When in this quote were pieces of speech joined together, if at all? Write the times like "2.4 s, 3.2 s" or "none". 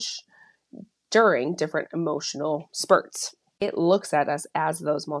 3.6 s